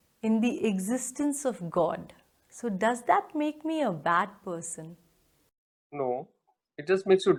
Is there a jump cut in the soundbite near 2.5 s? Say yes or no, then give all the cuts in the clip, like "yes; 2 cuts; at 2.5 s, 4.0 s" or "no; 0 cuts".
no; 0 cuts